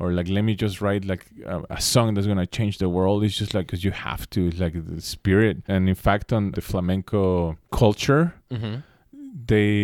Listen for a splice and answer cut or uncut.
cut